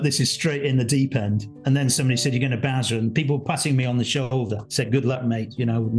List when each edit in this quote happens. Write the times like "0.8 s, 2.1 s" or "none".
none